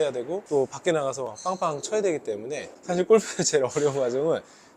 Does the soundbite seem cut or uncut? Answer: cut